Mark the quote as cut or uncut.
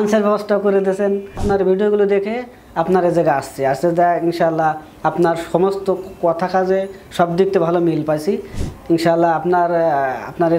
cut